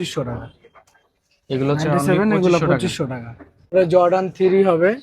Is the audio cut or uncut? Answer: cut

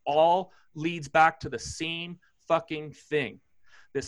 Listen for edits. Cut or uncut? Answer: uncut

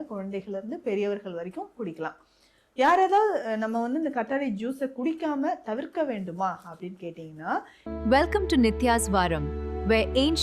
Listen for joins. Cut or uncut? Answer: cut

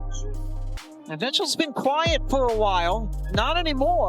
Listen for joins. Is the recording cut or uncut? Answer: cut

